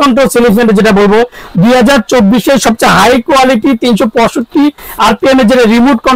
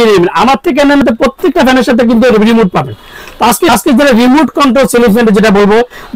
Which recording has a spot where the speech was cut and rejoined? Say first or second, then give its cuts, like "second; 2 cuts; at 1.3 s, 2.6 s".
second; 2 cuts; at 1.0 s, 3.7 s